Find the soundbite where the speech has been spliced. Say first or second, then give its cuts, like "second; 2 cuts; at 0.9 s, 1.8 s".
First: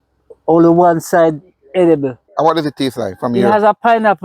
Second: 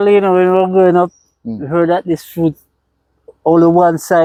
first; 1 cut; at 2.3 s